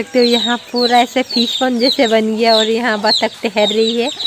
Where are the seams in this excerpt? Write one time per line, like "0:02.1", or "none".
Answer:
none